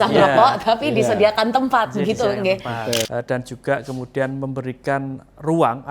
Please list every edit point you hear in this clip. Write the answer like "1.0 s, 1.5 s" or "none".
3.1 s